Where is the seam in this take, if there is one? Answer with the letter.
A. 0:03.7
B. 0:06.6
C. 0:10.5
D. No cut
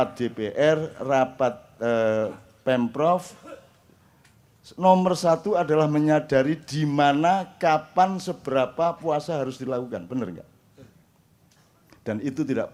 D